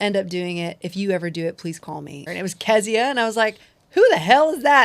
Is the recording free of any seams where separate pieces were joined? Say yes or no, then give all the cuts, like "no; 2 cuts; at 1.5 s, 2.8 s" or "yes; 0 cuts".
no; 1 cut; at 2.2 s